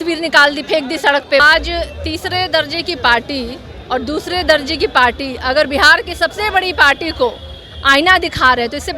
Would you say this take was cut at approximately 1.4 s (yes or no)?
yes